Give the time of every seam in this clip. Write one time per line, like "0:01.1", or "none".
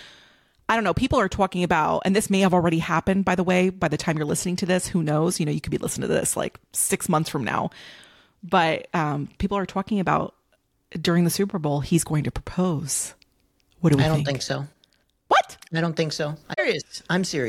0:16.6